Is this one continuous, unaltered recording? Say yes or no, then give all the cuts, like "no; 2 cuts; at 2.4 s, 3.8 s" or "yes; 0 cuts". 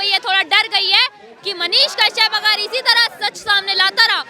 yes; 0 cuts